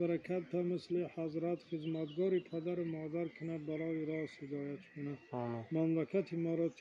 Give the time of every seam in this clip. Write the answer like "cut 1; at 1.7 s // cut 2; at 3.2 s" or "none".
none